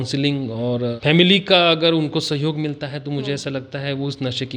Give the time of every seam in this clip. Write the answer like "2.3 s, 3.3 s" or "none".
1.0 s

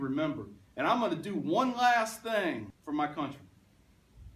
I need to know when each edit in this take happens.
2.7 s

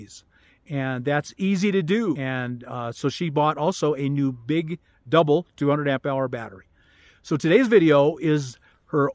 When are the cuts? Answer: 2.2 s

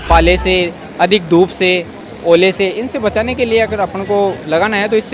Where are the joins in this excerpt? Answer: none

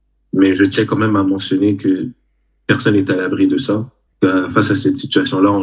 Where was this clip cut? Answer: 4.0 s

